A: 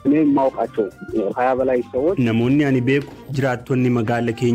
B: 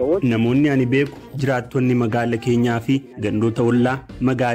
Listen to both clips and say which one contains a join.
A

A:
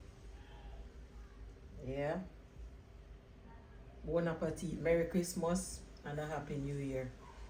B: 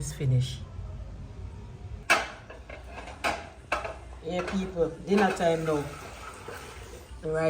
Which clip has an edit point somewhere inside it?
B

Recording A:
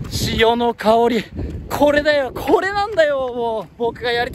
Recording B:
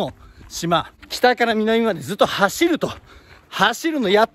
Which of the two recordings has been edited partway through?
B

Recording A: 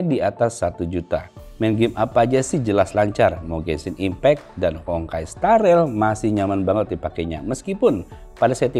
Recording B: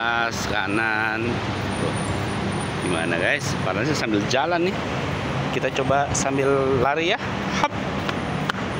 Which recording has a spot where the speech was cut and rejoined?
A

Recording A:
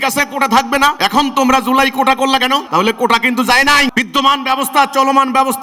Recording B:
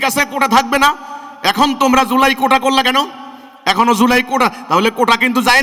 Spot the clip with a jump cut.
A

